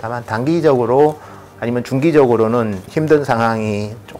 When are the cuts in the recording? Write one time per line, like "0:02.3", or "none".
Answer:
0:02.8